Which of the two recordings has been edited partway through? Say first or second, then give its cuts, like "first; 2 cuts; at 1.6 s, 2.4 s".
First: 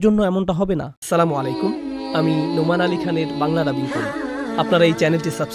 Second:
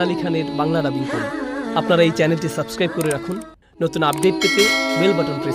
first; 1 cut; at 1.0 s